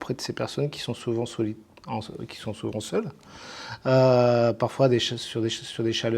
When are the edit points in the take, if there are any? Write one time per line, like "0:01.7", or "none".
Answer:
none